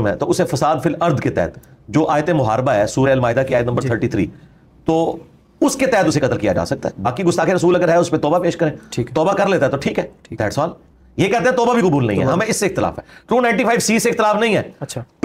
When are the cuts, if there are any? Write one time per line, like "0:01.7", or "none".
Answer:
none